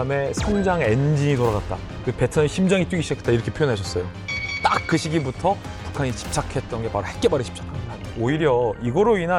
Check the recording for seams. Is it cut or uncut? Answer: cut